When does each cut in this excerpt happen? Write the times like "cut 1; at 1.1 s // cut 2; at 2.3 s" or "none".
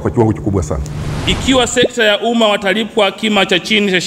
cut 1; at 1.1 s